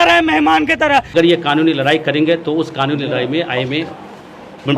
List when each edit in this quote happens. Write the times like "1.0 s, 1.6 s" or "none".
1.1 s